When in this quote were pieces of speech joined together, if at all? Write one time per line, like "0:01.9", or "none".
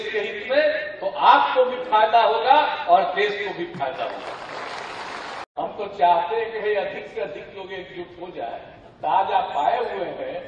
0:05.5